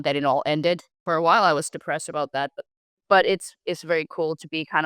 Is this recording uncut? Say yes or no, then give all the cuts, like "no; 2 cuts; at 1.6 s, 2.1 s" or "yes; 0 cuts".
no; 2 cuts; at 0.9 s, 2.6 s